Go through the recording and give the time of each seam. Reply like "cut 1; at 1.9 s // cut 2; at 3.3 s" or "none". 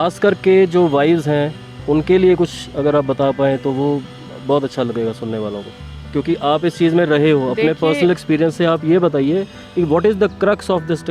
none

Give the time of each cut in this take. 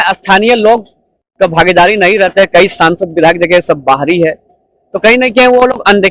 none

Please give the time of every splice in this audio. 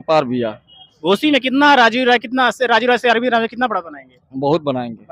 none

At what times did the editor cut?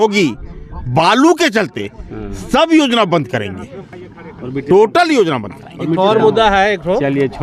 none

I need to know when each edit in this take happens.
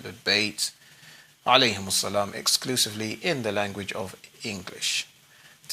cut 1; at 4.1 s

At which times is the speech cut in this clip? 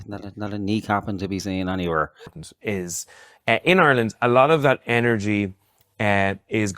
cut 1; at 2.4 s

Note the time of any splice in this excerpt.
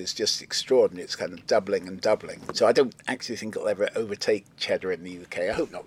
cut 1; at 2.4 s

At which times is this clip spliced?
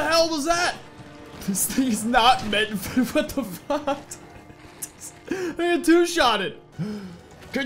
cut 1; at 6.7 s

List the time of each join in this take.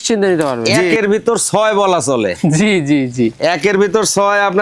cut 1; at 0.9 s

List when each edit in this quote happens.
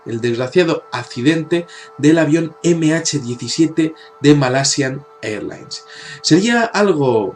cut 1; at 3.1 s

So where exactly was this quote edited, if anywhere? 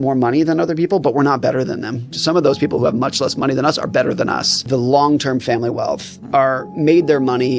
cut 1; at 2.2 s // cut 2; at 4.6 s

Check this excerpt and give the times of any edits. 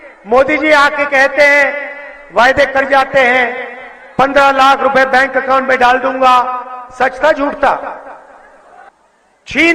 cut 1; at 8.9 s

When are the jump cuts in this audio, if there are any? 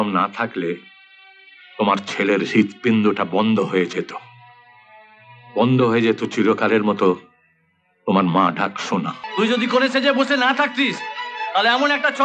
cut 1; at 9.2 s

